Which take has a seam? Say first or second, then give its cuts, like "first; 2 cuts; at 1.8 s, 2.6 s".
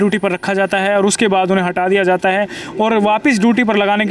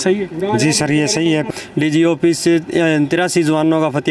second; 1 cut; at 1.5 s